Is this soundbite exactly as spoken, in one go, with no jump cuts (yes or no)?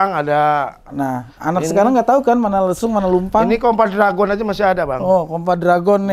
yes